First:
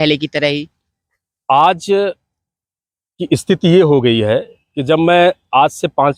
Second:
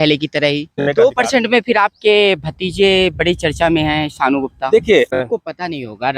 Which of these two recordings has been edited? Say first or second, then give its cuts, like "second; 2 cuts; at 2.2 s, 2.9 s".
second; 2 cuts; at 0.9 s, 5.1 s